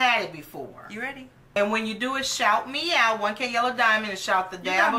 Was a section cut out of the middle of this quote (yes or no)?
yes